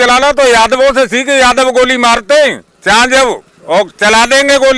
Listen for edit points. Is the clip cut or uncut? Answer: uncut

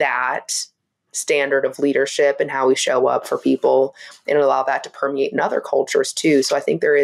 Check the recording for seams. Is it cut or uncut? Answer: uncut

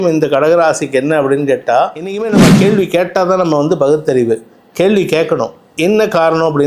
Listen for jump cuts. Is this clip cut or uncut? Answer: cut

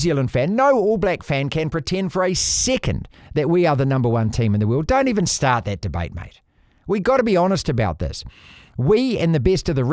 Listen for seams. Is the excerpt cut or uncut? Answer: uncut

